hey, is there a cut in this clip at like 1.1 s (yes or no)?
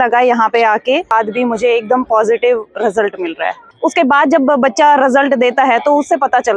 yes